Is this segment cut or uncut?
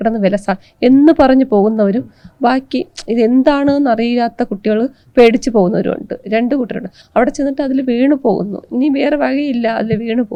uncut